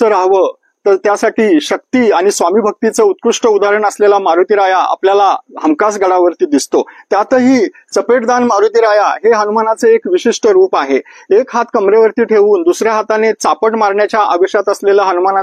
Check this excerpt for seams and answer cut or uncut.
uncut